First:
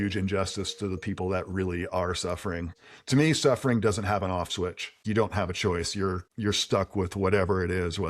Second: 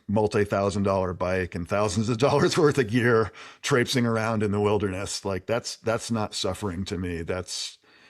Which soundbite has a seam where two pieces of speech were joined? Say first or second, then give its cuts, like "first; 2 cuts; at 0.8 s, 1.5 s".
first; 3 cuts; at 2.7 s, 5.0 s, 6.3 s